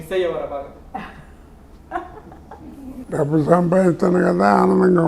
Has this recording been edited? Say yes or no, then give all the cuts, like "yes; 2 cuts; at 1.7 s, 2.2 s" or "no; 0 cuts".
yes; 1 cut; at 3.1 s